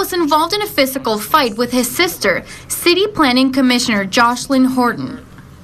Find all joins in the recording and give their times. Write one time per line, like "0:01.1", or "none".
0:01.0
0:02.8